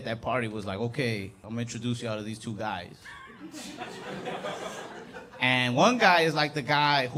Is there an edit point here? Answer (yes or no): no